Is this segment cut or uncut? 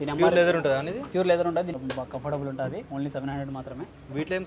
cut